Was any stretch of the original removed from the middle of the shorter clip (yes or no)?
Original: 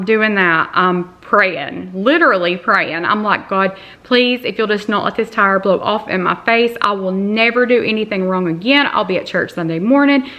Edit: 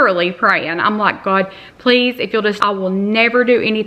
yes